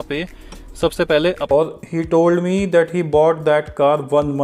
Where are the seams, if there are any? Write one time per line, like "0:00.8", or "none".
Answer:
0:01.5